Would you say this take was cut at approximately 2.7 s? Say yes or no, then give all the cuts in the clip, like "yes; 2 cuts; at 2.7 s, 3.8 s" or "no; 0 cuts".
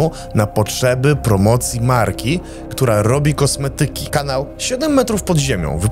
no; 1 cut; at 4.0 s